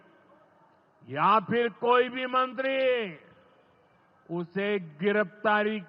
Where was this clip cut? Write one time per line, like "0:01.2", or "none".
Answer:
none